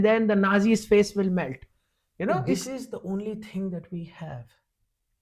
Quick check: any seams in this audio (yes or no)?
yes